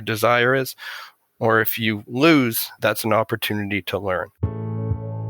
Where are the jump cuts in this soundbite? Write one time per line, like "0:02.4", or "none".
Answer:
0:02.7
0:04.4